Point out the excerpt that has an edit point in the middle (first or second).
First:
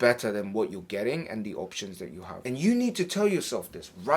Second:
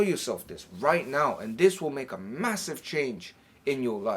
first